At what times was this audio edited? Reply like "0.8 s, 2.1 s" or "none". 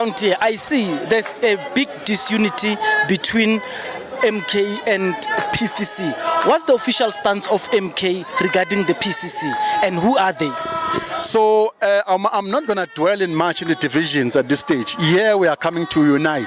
none